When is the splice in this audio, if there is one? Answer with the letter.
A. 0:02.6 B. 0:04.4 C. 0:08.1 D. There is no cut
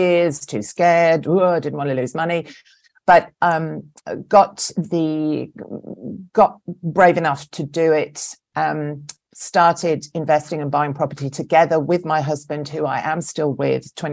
D